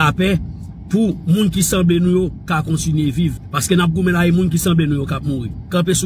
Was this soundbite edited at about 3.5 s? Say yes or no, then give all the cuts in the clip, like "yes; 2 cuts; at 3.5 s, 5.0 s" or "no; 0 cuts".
yes; 1 cut; at 3.5 s